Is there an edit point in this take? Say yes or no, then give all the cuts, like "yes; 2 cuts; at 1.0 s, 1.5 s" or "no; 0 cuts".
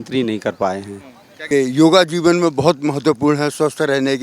yes; 1 cut; at 1.5 s